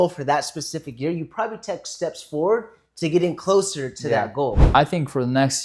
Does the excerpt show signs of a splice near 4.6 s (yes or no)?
yes